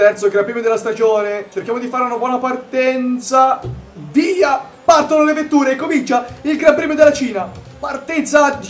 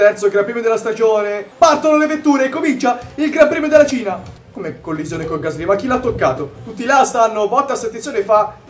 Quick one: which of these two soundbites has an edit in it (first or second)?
second